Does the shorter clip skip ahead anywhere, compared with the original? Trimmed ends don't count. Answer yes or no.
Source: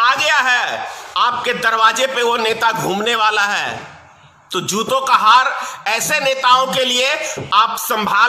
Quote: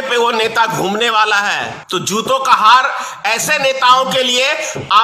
yes